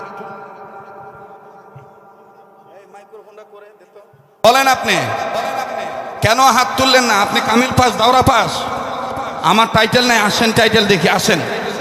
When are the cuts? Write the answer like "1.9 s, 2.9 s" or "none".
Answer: 4.4 s